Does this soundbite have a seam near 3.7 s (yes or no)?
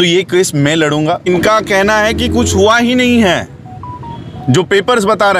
no